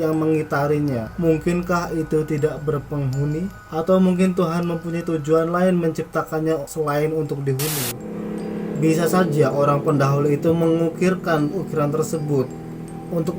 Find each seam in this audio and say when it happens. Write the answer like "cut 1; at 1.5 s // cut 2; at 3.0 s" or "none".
cut 1; at 7.9 s